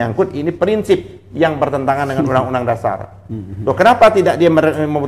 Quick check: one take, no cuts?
yes; 0 cuts

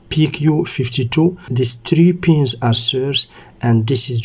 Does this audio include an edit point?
yes; 1 cut; at 1.5 s

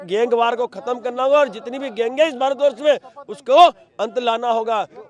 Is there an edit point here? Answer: no; 0 cuts

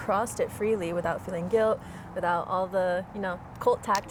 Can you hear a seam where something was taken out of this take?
no; 0 cuts

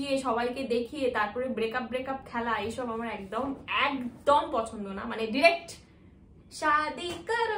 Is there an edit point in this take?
no; 0 cuts

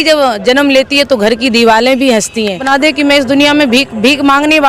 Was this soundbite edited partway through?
yes; 1 cut; at 2.6 s

